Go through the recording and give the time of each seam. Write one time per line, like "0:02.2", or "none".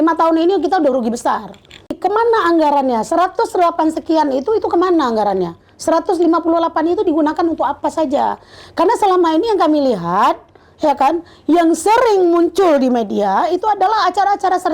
0:02.0